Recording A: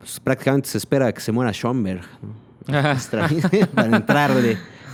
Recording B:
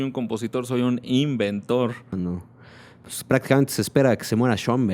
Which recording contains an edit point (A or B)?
B